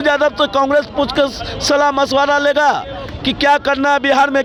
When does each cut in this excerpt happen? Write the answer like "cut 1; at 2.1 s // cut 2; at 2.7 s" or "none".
none